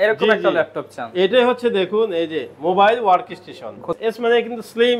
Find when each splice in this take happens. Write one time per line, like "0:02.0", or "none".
0:03.9